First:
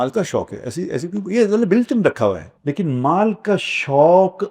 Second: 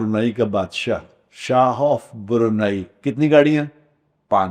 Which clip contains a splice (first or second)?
first